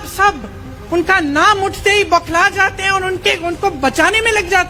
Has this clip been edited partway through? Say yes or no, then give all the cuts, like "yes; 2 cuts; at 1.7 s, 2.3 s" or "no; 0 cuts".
no; 0 cuts